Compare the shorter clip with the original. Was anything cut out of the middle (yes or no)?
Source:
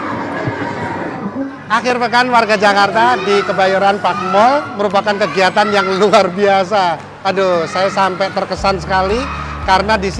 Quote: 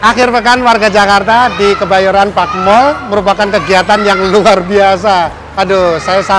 no